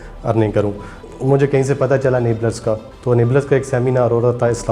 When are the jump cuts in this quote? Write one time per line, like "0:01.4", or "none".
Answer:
0:01.0
0:02.9